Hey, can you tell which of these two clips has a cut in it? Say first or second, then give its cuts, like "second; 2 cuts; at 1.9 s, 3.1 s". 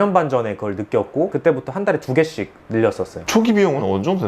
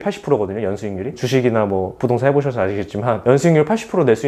first; 1 cut; at 3.2 s